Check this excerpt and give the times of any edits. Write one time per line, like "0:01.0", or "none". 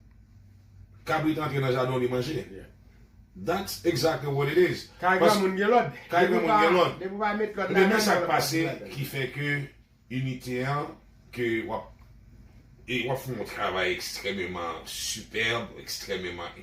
none